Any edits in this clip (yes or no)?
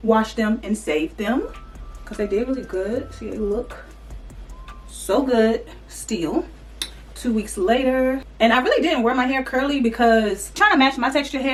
no